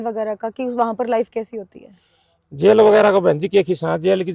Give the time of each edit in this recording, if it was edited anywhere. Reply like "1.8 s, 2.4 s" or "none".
none